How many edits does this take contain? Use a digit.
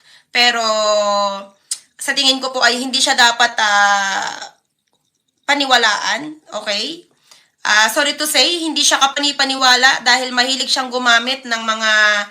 1